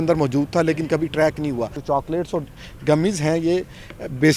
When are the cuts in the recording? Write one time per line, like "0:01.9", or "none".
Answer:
0:01.8

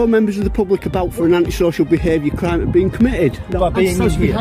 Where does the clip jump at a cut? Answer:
none

